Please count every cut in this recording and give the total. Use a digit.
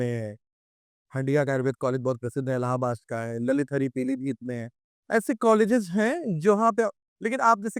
0